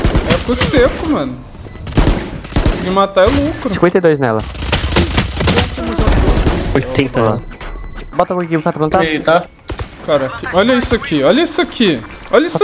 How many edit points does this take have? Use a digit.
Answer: 1